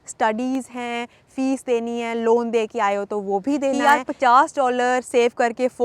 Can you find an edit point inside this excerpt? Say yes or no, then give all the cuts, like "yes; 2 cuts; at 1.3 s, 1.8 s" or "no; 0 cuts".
yes; 1 cut; at 3.8 s